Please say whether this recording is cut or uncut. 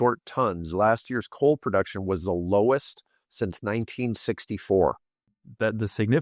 cut